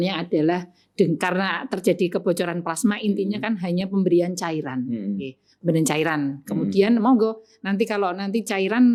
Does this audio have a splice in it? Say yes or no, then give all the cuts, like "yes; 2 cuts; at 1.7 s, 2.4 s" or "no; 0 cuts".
no; 0 cuts